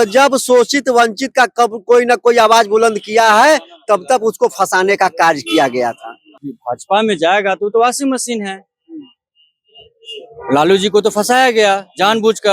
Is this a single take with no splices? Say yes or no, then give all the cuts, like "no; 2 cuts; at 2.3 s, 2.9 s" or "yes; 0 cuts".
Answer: no; 1 cut; at 6.5 s